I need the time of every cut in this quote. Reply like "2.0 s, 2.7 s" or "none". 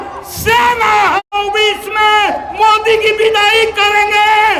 1.2 s